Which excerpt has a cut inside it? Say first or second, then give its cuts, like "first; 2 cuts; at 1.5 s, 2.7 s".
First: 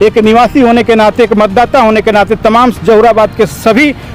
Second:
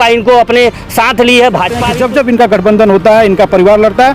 second; 1 cut; at 1.9 s